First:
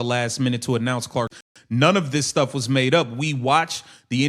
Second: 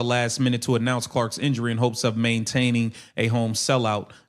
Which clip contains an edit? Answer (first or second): first